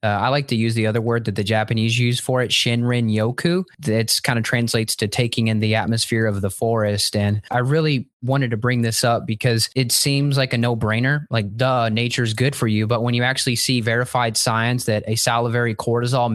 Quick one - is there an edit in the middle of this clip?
yes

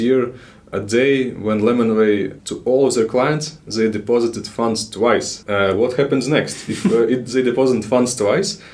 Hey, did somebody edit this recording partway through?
yes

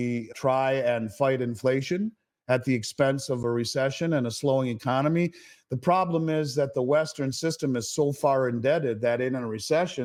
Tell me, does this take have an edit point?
no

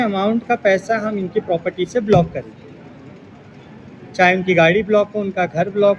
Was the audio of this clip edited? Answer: no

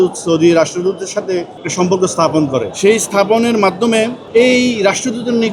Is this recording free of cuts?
no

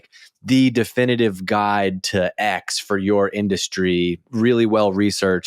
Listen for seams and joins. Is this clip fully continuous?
no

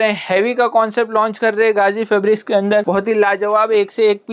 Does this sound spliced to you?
yes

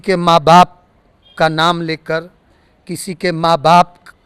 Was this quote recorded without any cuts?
yes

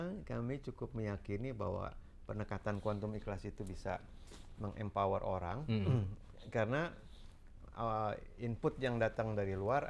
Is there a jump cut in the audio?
no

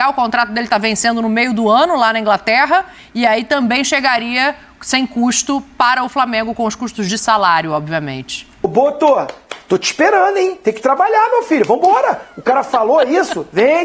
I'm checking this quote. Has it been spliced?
yes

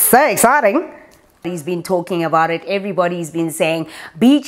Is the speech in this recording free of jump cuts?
no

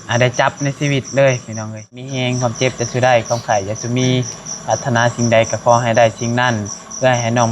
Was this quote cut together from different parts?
yes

